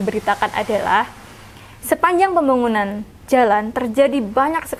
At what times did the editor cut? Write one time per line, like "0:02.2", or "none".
none